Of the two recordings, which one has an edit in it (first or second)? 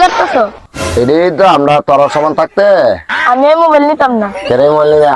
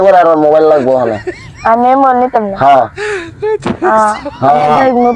first